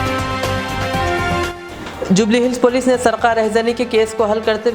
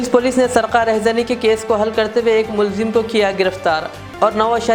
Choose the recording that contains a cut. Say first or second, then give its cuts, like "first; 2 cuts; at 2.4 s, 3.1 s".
first; 1 cut; at 1.6 s